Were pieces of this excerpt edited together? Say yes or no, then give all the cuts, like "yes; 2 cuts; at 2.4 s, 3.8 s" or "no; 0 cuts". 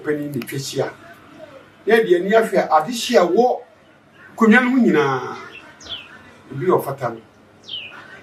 no; 0 cuts